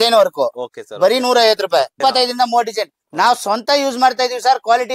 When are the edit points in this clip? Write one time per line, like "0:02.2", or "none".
0:02.0

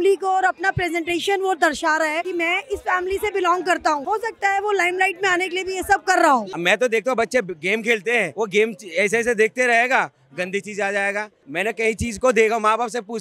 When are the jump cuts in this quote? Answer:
0:02.3
0:04.0
0:06.5
0:08.3
0:11.4

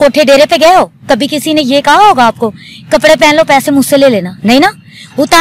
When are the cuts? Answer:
none

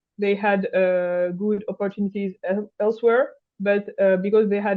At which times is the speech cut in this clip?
none

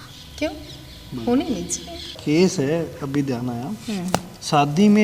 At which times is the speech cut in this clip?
0:02.1

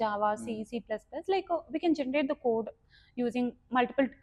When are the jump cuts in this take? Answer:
none

